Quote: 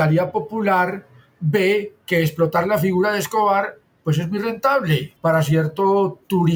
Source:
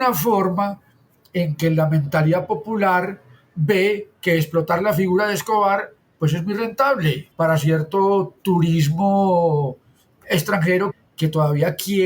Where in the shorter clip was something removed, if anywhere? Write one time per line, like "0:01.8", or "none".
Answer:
none